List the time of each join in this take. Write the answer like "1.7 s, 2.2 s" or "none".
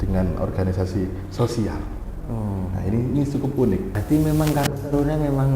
4.0 s